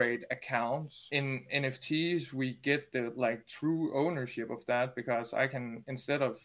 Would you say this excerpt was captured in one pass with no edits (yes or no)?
no